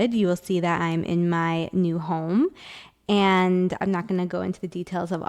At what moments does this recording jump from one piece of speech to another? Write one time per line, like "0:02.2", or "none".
none